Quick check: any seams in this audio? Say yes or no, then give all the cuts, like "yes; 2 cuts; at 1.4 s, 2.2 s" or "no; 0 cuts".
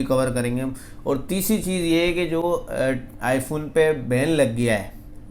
no; 0 cuts